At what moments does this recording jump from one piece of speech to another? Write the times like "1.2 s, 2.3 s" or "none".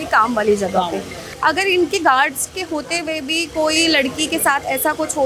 1.3 s